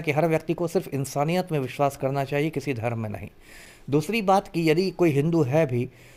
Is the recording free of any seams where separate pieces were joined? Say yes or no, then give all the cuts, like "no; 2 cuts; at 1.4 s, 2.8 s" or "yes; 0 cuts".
yes; 0 cuts